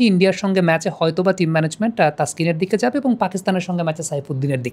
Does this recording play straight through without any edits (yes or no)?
yes